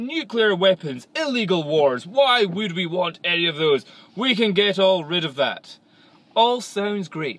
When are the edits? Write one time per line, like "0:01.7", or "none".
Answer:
none